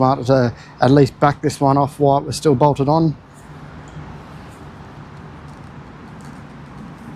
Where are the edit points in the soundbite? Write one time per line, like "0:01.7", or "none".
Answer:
none

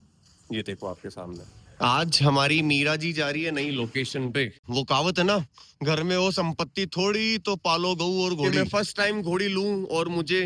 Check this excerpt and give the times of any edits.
0:01.4
0:04.7
0:08.5

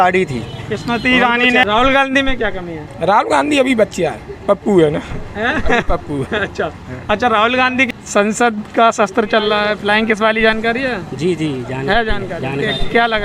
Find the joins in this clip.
0:01.6
0:07.9

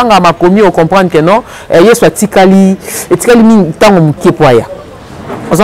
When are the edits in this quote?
none

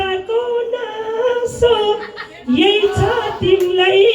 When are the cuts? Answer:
none

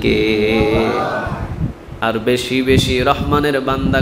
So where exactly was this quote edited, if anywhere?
0:01.8

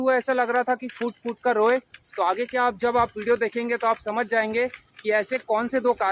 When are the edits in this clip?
none

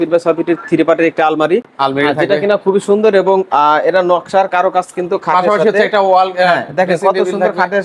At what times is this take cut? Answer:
none

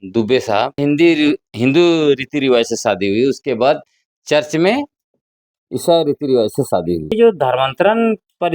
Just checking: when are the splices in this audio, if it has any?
0:00.8
0:07.1

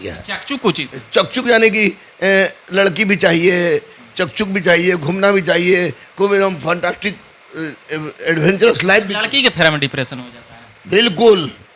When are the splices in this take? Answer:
none

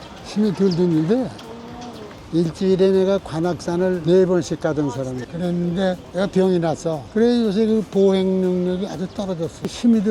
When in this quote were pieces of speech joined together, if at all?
0:02.1
0:07.0

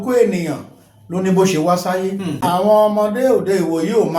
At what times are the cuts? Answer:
0:02.3

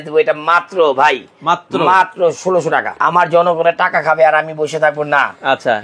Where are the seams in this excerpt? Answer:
0:02.9

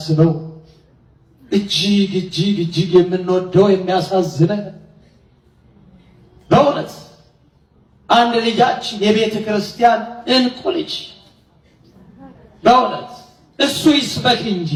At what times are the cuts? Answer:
none

